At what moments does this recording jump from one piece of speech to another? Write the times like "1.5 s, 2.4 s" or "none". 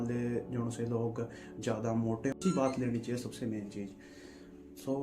2.4 s